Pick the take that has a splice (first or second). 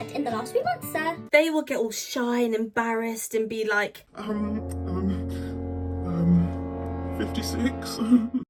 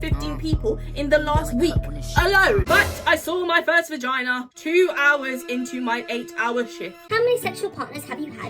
second